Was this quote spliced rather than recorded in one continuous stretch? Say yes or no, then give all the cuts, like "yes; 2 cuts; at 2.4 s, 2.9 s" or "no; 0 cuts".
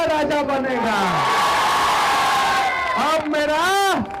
no; 0 cuts